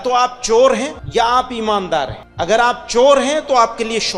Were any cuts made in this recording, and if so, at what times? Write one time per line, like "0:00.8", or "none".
0:01.0
0:02.2